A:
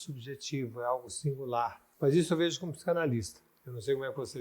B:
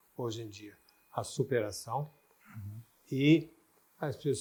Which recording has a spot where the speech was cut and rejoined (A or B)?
A